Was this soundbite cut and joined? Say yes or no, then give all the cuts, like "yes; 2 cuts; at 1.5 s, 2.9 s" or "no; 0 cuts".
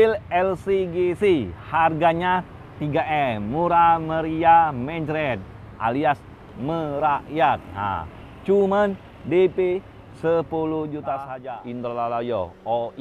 yes; 1 cut; at 11.3 s